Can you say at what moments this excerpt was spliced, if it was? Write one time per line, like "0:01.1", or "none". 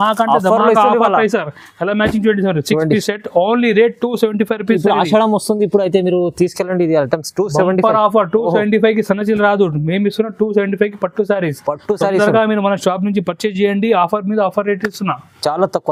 none